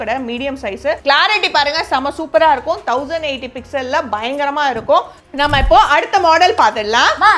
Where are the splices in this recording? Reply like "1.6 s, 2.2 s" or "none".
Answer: 5.2 s